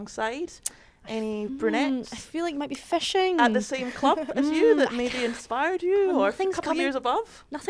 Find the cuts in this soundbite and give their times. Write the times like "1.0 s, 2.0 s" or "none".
none